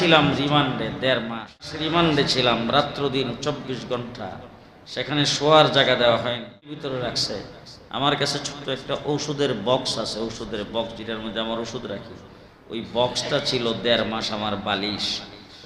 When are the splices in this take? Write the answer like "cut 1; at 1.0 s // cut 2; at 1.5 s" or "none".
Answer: cut 1; at 1.8 s // cut 2; at 6.9 s